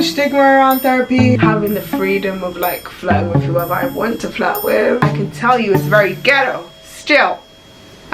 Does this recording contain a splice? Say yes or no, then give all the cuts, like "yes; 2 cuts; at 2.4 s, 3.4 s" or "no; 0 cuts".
yes; 2 cuts; at 1.4 s, 5.1 s